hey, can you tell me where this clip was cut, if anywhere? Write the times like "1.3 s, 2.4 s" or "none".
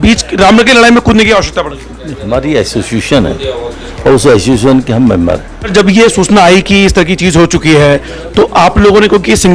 5.6 s